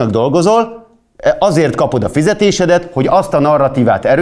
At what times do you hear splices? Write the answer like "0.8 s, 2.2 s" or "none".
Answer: none